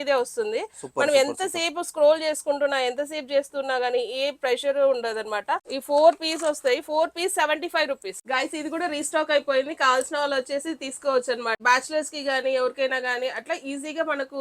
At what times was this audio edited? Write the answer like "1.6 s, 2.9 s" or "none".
5.7 s, 8.1 s, 11.6 s